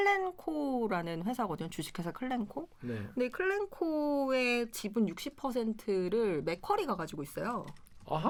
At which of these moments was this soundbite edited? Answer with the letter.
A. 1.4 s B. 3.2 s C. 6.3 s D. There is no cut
D